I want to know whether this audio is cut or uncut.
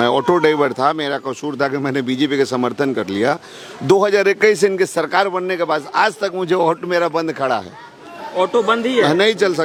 uncut